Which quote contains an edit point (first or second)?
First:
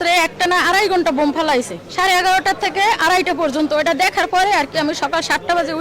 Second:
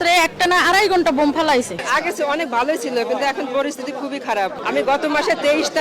second